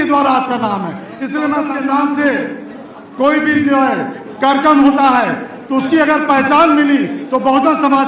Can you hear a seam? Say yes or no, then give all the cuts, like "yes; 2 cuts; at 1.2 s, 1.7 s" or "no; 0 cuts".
yes; 1 cut; at 1.7 s